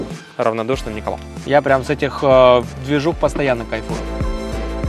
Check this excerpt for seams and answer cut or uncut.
cut